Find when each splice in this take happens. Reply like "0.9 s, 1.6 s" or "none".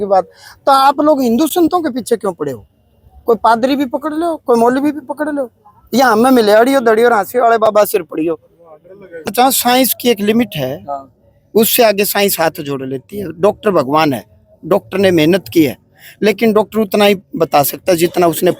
9.3 s